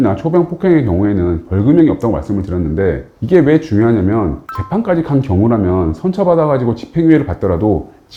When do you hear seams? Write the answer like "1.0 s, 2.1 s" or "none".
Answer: none